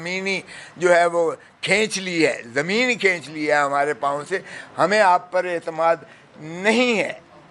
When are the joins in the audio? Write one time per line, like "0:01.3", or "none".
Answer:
none